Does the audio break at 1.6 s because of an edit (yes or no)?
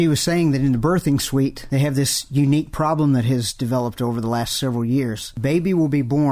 yes